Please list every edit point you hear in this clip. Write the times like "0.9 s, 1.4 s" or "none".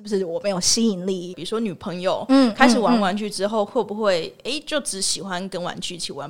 1.4 s